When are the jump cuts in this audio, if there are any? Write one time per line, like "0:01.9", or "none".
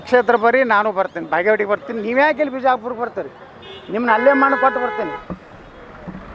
none